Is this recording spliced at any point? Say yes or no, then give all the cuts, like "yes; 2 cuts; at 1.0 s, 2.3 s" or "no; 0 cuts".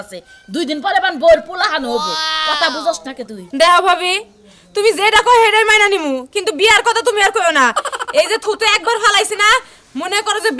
no; 0 cuts